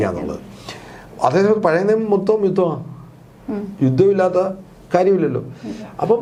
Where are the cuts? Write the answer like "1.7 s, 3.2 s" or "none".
none